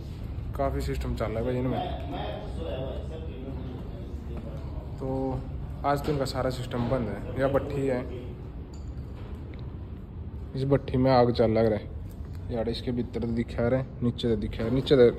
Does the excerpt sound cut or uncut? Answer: uncut